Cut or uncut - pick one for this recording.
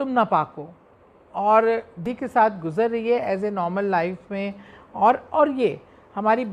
cut